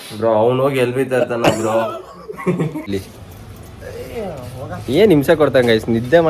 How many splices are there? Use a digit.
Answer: 1